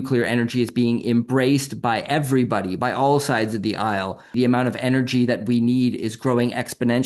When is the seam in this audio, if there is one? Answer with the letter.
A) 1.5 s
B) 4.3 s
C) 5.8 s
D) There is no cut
B